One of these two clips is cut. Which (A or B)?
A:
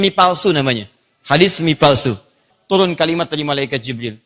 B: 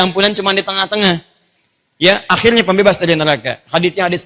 A